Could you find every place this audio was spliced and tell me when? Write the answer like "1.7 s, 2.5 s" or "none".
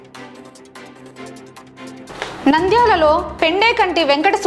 1.3 s